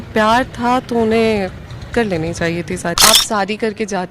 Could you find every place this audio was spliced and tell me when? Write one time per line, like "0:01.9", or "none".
0:03.0